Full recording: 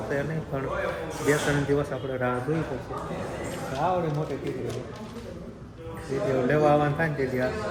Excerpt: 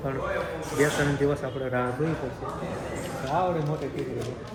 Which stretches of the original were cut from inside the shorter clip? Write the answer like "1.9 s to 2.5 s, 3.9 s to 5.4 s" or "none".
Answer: none